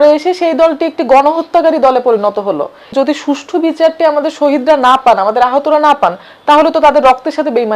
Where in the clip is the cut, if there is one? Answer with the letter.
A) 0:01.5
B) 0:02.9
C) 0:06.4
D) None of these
B